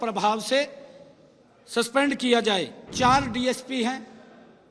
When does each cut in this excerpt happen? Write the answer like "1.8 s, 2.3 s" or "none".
2.8 s

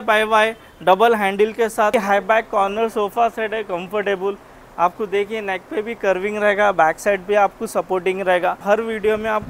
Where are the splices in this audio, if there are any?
1.9 s, 8.6 s

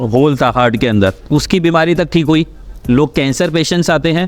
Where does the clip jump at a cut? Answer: none

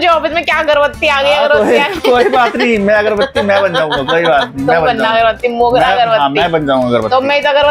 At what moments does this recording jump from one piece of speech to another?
none

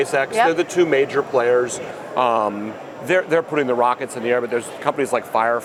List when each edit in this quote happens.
none

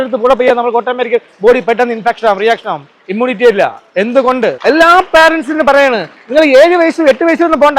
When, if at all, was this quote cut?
4.6 s

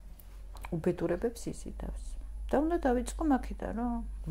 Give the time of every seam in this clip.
none

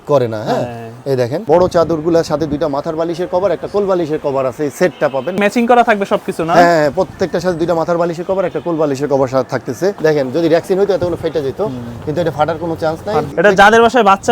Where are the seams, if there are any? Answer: 1.4 s, 5.4 s, 10.0 s, 13.3 s

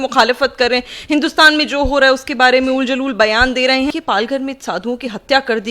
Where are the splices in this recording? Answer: 3.9 s

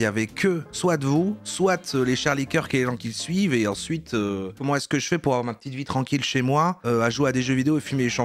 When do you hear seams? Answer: 3.1 s

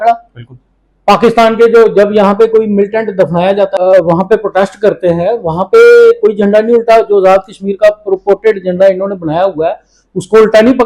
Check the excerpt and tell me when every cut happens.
3.8 s

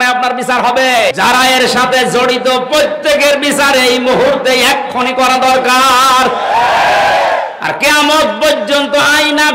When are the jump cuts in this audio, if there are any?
1.1 s

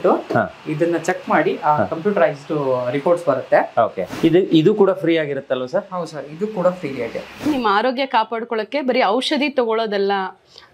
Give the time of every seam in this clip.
4.1 s, 7.5 s

